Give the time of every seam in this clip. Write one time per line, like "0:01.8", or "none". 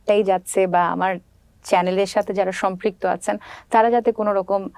none